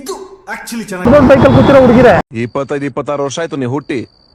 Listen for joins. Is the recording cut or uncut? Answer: cut